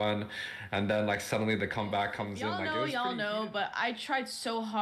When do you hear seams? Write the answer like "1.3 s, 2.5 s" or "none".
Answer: 2.6 s

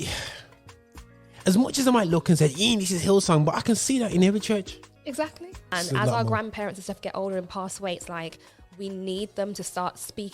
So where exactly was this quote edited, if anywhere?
5.7 s

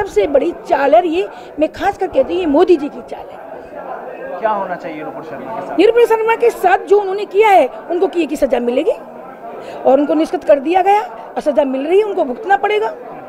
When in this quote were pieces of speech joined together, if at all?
none

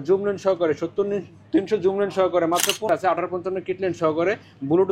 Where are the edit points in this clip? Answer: 2.9 s

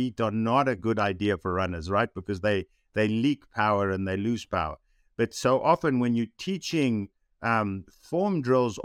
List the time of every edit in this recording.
none

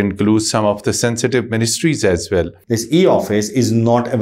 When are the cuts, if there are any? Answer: 2.6 s

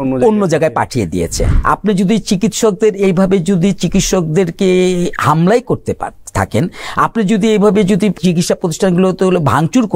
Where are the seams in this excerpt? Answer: 1.5 s, 8.2 s

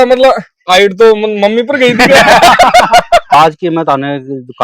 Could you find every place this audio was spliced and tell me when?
3.3 s

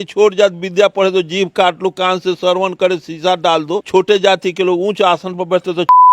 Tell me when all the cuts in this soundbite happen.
3.8 s

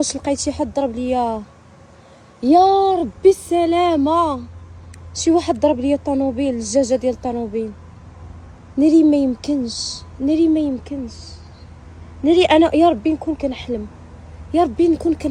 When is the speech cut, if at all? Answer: none

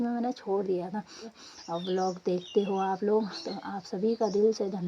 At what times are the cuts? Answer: 1.3 s

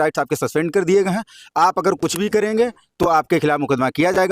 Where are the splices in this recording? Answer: none

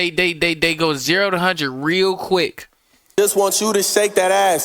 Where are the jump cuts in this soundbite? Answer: 3.0 s

